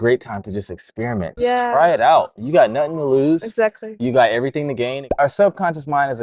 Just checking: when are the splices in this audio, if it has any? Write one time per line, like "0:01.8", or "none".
0:01.3
0:05.0